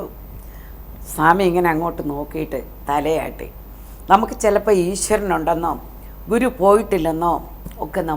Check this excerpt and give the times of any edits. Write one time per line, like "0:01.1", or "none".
none